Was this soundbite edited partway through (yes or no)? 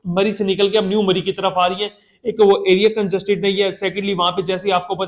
no